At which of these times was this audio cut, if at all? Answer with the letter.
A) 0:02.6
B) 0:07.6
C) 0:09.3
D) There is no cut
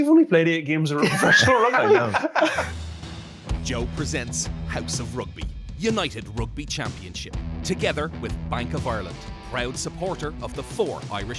A